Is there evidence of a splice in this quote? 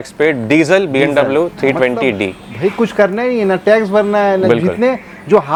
no; 0 cuts

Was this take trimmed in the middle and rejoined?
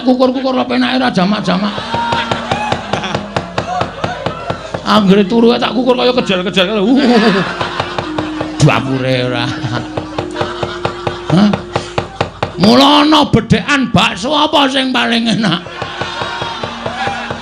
no; 0 cuts

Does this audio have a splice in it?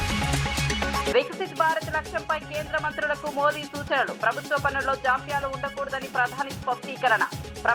yes; 1 cut; at 1.1 s

